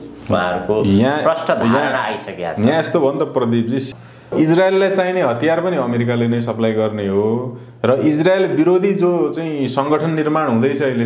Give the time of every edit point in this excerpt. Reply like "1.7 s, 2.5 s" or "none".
3.8 s